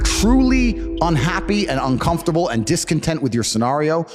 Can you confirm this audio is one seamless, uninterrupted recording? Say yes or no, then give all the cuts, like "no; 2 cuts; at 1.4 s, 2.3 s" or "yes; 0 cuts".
yes; 0 cuts